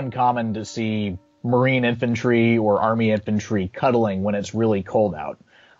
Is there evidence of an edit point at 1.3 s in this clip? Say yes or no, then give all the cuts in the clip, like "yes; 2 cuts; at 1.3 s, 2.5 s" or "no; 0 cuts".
yes; 1 cut; at 1.3 s